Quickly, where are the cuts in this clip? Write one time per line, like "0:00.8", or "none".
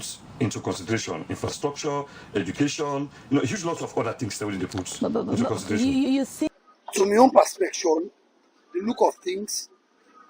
0:06.5